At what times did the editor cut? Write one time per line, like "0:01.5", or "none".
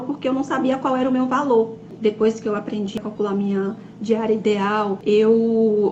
0:03.0
0:05.0